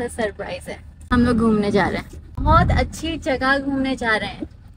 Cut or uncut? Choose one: cut